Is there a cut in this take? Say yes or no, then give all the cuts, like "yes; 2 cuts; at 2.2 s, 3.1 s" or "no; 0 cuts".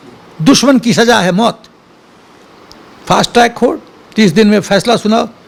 no; 0 cuts